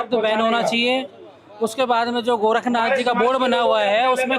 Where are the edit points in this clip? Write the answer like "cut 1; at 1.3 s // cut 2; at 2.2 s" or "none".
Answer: none